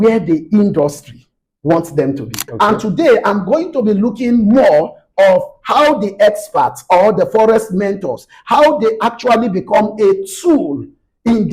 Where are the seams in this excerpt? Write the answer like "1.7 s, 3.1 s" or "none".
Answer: 2.5 s